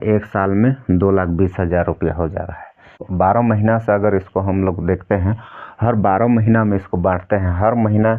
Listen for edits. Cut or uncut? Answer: cut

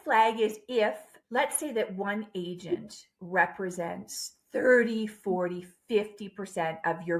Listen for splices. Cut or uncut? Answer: cut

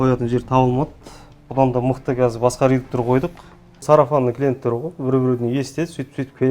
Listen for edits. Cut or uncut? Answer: cut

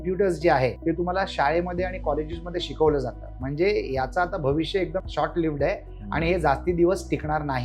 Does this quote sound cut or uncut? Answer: cut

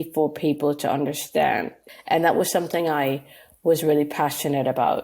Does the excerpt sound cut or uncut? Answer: cut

